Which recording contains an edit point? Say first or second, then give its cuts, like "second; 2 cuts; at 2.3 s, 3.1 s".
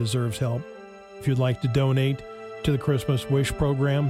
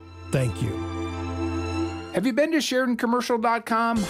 second; 1 cut; at 2.1 s